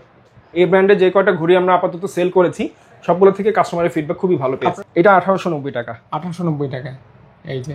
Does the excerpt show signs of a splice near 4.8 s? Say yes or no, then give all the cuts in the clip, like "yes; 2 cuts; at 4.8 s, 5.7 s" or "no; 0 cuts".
yes; 1 cut; at 4.8 s